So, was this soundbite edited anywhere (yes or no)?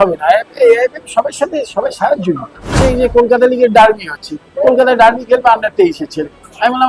yes